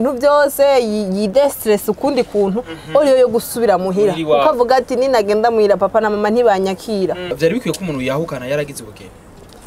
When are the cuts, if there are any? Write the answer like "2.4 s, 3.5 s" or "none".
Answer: 7.3 s